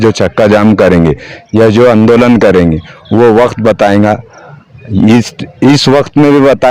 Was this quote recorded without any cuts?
yes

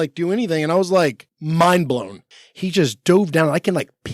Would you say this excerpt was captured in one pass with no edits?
no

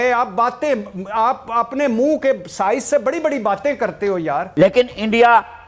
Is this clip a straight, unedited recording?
no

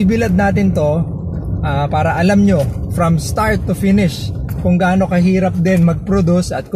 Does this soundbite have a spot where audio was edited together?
no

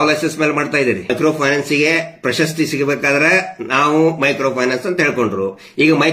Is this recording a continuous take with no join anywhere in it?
no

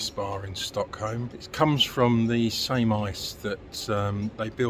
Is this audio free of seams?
no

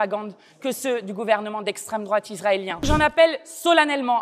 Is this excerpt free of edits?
no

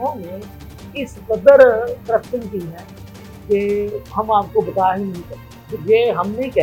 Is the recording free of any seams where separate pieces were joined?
yes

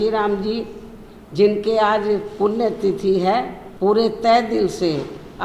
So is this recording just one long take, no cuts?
no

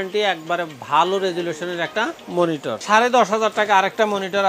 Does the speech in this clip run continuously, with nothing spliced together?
no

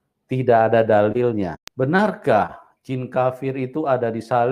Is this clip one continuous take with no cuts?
no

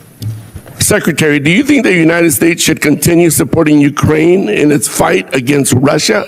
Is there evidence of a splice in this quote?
no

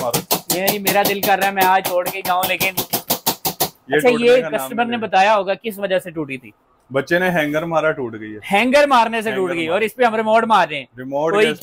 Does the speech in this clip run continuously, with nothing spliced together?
yes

